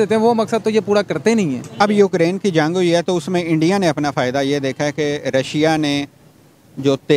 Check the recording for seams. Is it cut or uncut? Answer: cut